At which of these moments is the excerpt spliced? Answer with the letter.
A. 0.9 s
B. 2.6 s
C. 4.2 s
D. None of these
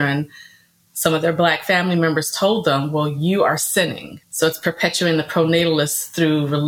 C